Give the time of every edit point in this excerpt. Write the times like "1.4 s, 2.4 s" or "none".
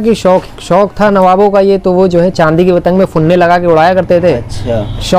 none